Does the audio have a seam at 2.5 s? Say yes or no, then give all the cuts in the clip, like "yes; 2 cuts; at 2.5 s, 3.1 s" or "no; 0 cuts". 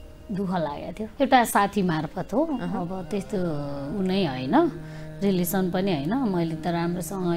no; 1 cut; at 1.0 s